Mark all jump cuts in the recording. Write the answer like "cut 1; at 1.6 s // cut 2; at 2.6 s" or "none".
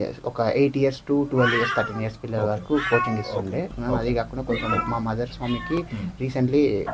cut 1; at 3.7 s

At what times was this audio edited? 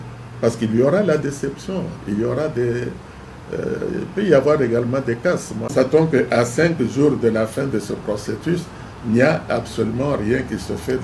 cut 1; at 5.7 s

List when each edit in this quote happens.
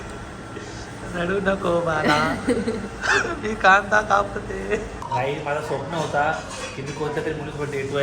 cut 1; at 5.0 s

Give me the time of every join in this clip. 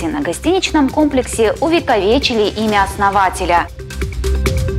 cut 1; at 3.9 s

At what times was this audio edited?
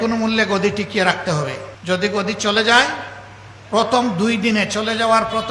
cut 1; at 1.7 s

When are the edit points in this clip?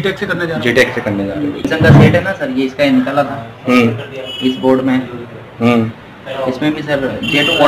cut 1; at 1.7 s

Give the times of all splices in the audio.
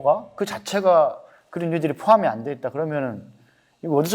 none

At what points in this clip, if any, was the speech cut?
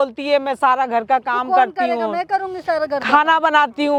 none

